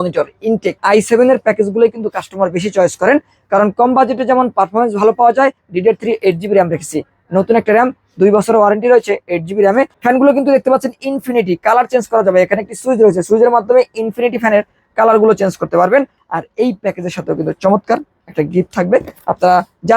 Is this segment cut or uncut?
cut